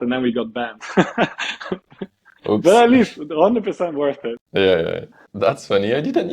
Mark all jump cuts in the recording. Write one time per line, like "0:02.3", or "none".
0:04.3
0:05.2